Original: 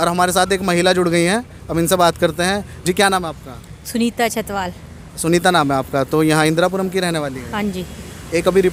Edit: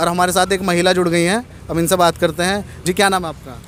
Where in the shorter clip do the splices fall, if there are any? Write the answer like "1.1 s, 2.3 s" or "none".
none